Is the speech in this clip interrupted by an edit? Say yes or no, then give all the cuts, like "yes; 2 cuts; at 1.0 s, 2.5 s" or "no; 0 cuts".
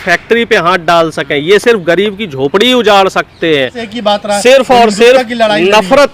yes; 1 cut; at 3.8 s